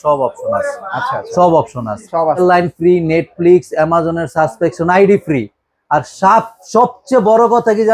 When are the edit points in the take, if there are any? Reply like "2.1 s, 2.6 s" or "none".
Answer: 2.4 s